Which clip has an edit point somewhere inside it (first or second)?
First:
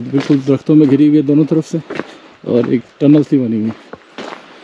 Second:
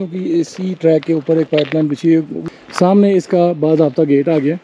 second